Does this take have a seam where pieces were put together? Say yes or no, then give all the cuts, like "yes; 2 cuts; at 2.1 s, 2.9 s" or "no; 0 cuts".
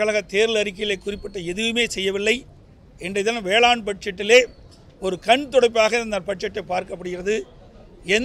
no; 0 cuts